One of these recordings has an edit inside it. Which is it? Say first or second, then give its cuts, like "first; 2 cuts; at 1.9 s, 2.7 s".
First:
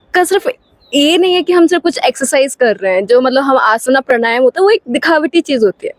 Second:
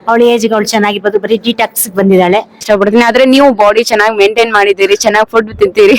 second; 1 cut; at 2.6 s